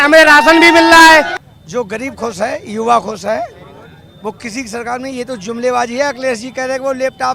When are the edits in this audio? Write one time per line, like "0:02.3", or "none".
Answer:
0:01.4